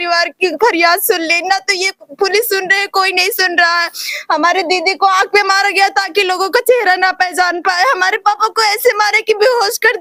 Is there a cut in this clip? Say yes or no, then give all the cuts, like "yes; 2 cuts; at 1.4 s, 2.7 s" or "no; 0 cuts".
no; 0 cuts